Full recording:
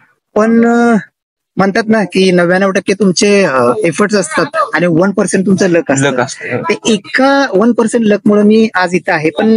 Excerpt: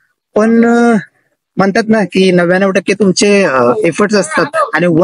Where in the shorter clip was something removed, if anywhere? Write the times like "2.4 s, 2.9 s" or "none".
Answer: none